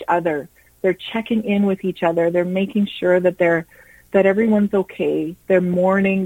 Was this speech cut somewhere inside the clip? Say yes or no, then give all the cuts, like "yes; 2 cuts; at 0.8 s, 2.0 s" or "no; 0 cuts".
yes; 1 cut; at 5.4 s